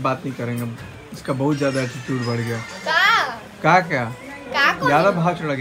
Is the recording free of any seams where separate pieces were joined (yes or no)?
yes